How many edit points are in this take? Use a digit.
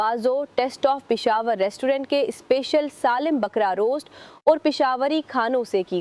0